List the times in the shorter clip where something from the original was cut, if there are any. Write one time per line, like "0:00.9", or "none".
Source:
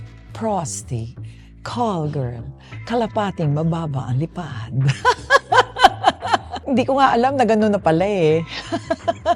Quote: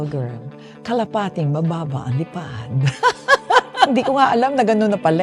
0:03.9

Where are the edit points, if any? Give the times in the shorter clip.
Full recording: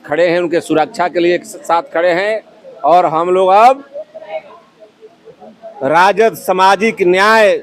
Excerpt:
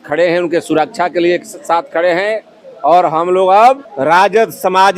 0:03.9

